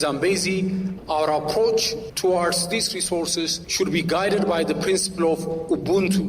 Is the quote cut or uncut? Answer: cut